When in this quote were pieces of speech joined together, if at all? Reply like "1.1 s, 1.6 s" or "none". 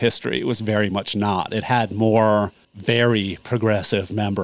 2.7 s